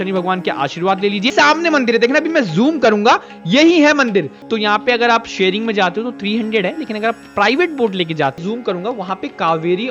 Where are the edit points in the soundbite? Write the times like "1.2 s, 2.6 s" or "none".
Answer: 1.3 s, 4.4 s, 8.4 s